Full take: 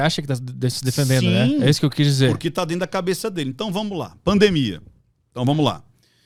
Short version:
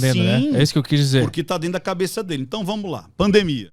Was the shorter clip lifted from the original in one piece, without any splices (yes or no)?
yes